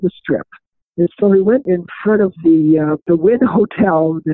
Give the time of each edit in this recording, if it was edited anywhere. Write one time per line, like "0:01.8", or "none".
0:01.7
0:03.0